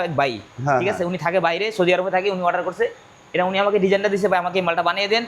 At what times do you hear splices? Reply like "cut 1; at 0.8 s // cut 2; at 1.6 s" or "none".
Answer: none